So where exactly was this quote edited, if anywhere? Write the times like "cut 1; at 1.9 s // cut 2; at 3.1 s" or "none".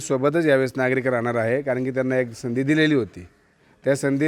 none